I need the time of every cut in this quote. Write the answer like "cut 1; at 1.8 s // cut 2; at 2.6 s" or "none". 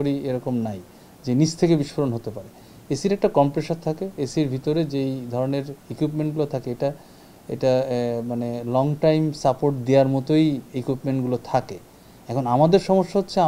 none